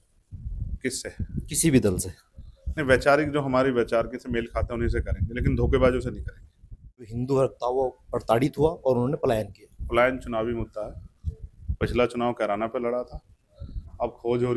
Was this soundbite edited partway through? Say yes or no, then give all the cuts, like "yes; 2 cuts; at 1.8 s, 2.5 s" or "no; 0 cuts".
yes; 1 cut; at 7.1 s